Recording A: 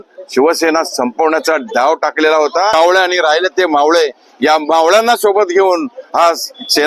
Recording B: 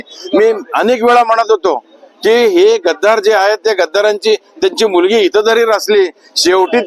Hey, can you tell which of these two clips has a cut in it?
A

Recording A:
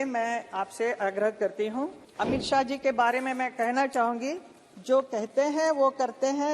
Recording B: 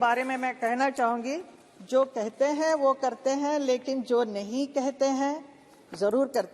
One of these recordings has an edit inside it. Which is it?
A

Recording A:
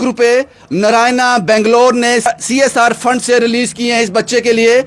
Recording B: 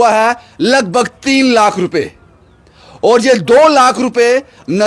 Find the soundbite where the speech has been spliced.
A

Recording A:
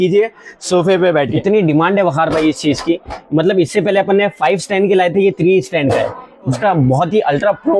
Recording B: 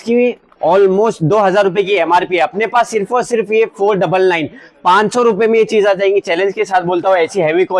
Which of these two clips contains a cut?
A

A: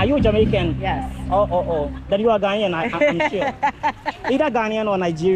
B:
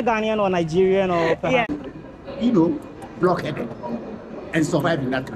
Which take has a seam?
B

